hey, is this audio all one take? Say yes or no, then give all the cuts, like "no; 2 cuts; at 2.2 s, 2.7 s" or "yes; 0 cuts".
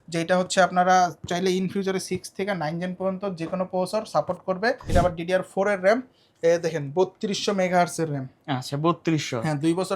no; 1 cut; at 4.8 s